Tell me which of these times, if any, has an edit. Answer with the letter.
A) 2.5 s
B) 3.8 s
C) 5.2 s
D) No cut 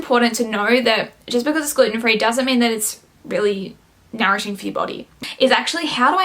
C